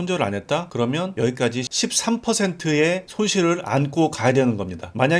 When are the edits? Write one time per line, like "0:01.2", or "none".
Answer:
0:01.7